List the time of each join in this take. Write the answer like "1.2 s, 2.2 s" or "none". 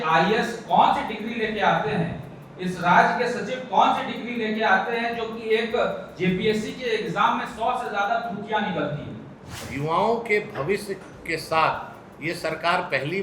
9.6 s